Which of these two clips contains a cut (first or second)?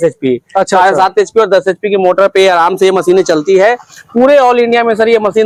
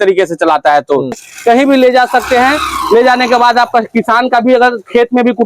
second